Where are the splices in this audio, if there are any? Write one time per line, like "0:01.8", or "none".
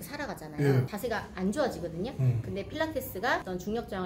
0:00.9